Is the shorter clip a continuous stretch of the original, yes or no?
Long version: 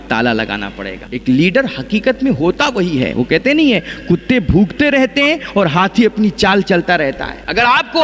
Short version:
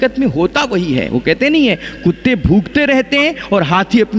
yes